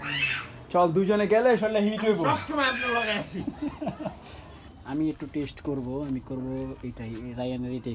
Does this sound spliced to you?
yes; 1 cut; at 4.7 s

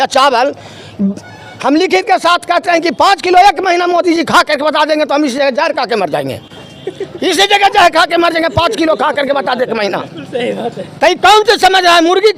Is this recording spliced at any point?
no; 0 cuts

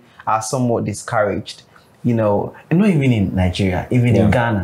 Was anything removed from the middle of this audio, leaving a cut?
no; 0 cuts

